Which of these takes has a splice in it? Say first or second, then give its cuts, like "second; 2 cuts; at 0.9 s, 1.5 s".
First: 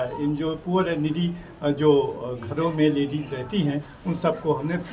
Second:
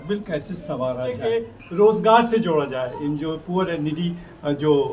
second; 1 cut; at 1.2 s